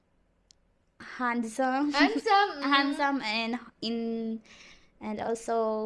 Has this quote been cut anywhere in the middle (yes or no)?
no